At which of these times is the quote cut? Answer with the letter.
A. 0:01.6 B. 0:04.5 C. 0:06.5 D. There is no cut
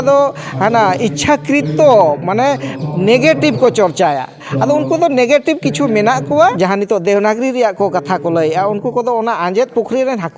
C